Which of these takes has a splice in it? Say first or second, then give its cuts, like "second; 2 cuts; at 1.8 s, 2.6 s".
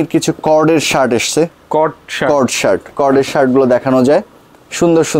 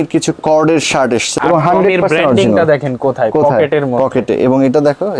second; 1 cut; at 1.3 s